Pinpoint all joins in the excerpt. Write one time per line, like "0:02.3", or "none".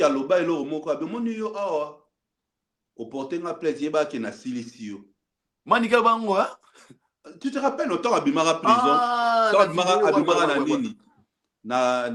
none